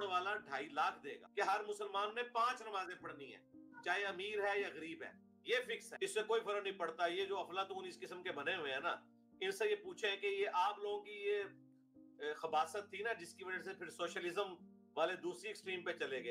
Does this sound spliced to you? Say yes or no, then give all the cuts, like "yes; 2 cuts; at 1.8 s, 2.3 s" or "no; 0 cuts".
yes; 2 cuts; at 1.1 s, 5.9 s